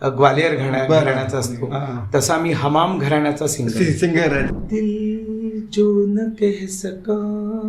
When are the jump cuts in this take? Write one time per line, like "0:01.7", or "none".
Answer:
0:04.5